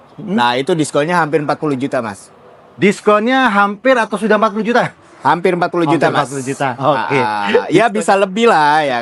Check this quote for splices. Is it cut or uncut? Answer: uncut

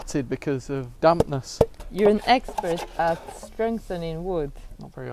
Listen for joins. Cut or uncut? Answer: cut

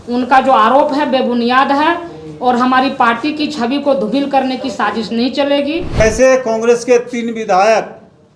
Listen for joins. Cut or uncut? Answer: cut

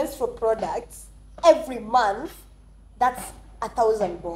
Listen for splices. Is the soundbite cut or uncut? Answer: uncut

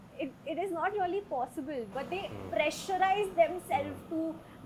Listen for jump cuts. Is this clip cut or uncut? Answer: uncut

